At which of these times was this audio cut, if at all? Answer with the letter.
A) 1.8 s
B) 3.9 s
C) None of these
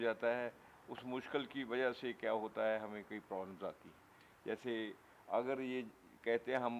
C